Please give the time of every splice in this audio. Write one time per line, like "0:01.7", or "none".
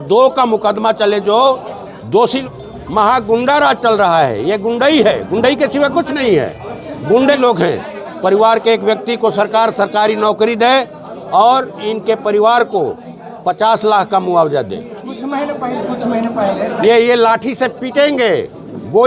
0:02.4
0:07.4
0:16.7